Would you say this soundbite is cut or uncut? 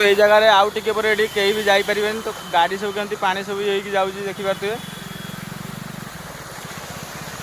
uncut